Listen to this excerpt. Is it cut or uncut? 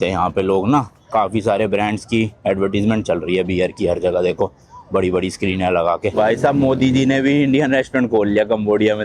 uncut